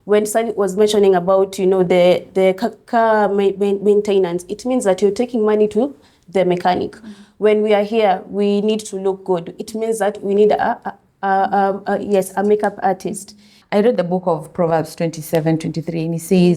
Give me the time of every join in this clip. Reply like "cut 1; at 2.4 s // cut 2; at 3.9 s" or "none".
cut 1; at 13.5 s